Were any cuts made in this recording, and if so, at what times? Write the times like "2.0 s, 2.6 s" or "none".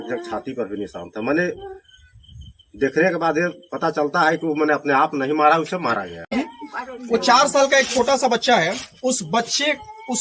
6.3 s